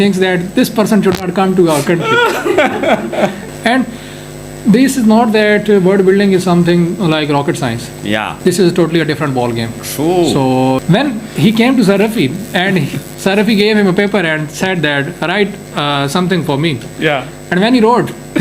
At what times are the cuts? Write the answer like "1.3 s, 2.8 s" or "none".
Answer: 3.4 s, 8.3 s, 10.8 s